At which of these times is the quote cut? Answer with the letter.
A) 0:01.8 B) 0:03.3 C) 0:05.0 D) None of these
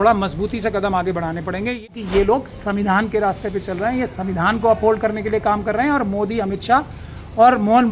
A